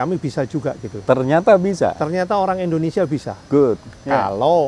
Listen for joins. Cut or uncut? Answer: uncut